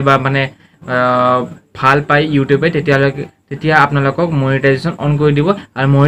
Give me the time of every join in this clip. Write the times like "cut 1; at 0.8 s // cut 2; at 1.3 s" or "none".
none